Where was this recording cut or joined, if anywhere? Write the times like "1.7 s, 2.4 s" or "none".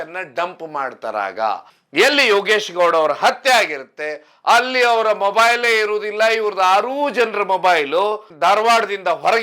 1.7 s, 8.3 s